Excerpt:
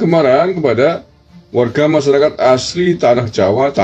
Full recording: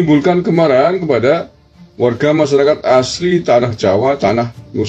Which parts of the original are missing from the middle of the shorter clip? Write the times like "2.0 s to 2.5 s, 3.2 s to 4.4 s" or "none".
none